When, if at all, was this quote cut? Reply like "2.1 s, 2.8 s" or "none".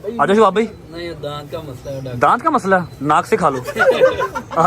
3.7 s